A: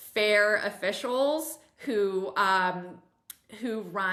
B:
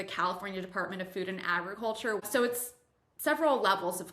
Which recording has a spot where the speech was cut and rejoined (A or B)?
B